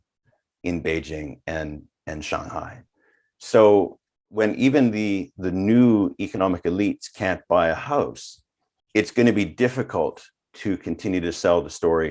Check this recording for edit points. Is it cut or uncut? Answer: uncut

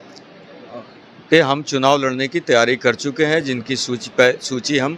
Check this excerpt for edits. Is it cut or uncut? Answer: uncut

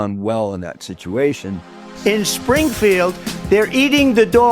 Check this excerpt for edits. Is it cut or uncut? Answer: cut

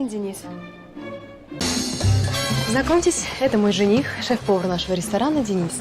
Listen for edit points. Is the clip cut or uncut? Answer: cut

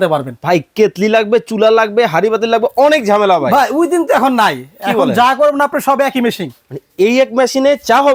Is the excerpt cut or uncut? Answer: uncut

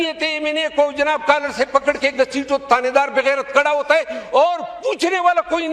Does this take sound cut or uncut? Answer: uncut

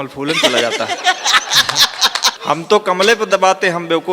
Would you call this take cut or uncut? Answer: cut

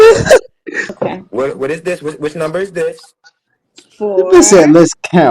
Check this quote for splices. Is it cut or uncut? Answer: cut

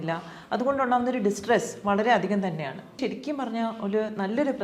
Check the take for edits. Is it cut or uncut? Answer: cut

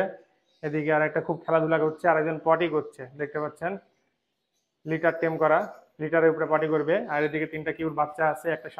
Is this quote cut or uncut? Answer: uncut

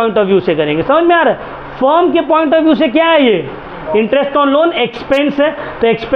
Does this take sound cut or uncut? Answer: uncut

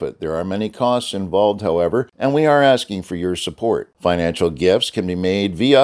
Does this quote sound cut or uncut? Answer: cut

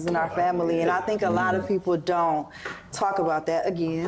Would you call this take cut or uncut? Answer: uncut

